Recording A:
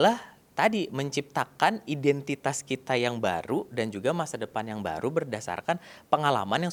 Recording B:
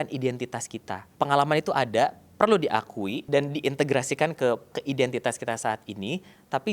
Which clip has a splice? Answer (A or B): B